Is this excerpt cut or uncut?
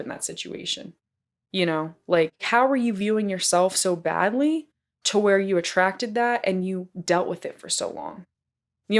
cut